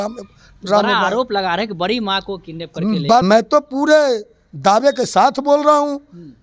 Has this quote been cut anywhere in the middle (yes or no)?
yes